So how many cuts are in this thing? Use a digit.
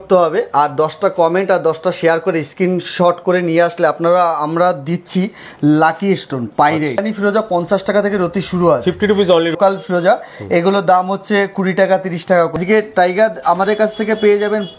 3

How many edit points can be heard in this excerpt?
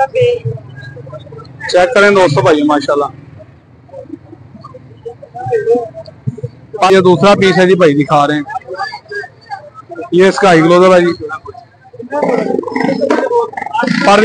1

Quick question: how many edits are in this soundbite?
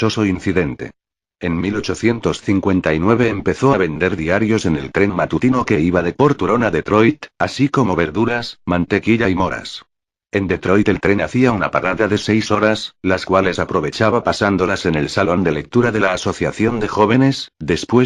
0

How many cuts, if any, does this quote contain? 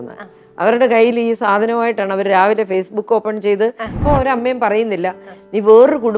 1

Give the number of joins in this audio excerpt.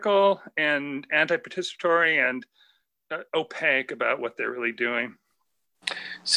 0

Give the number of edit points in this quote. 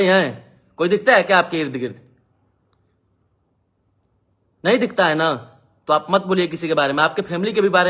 0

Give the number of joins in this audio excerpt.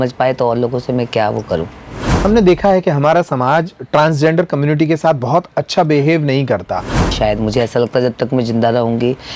2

